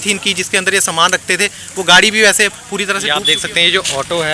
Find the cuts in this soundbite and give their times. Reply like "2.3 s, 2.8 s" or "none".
3.1 s